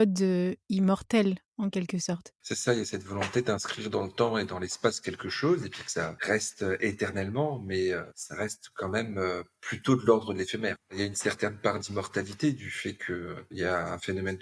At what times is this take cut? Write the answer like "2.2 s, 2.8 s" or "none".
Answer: 2.4 s, 6.2 s, 8.2 s, 10.9 s, 13.4 s